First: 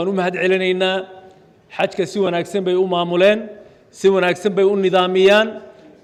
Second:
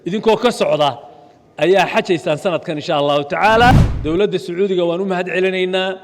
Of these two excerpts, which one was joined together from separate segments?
second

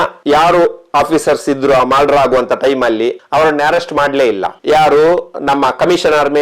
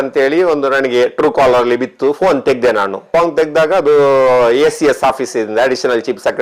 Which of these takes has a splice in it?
first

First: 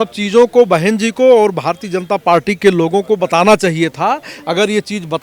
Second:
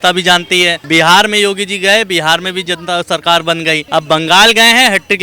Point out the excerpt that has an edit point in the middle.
second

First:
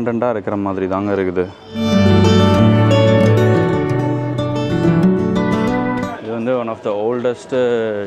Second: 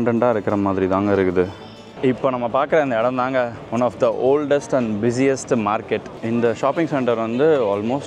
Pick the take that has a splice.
second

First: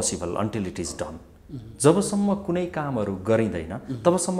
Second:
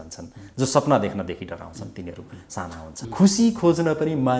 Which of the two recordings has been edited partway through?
second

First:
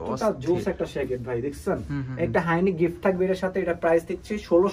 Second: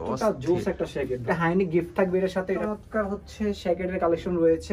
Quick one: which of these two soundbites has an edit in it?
second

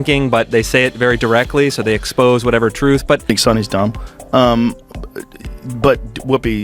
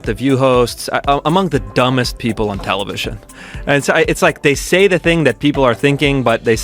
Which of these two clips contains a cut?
first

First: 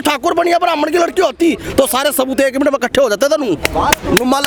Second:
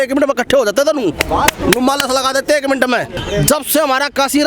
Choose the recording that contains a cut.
second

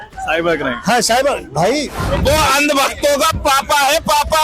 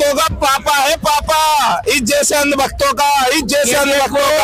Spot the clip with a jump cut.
first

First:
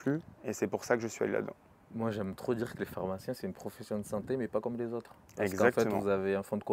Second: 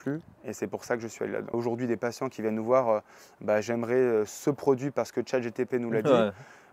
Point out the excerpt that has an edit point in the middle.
second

